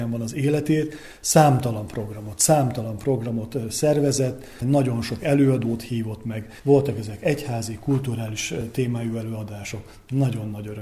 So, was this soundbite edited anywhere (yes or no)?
no